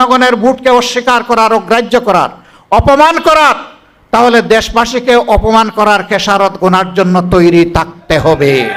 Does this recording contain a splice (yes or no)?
no